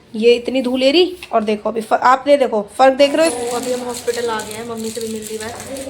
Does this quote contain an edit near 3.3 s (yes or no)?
yes